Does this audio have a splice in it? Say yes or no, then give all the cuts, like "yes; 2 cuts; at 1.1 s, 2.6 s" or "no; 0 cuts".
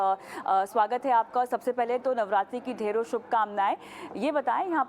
yes; 1 cut; at 3.3 s